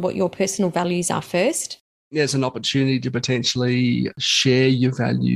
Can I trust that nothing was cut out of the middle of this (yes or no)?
no